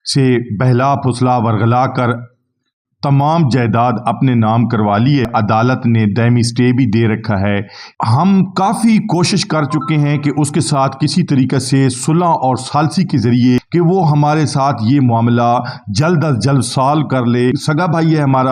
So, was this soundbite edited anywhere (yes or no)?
yes